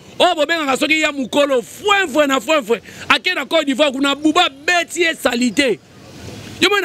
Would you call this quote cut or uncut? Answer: uncut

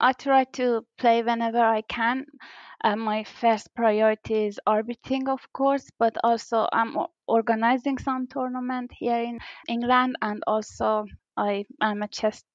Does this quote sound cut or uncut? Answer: cut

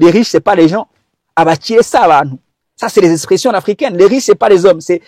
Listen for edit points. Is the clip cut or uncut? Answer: uncut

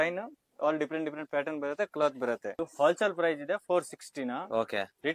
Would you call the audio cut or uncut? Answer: uncut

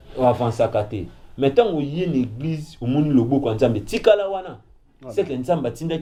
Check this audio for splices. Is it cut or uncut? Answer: uncut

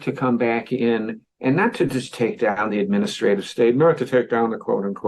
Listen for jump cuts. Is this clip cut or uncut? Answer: uncut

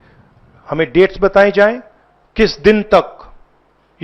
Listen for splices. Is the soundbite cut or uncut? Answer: uncut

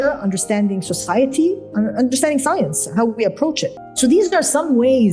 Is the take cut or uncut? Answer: cut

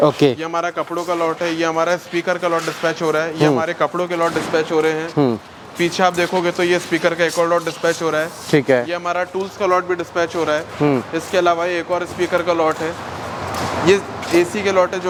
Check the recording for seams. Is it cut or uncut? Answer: uncut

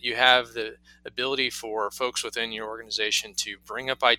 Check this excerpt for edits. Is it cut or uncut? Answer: uncut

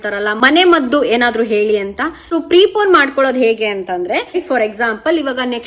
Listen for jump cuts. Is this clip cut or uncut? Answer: cut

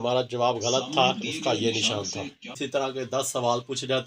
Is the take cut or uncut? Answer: cut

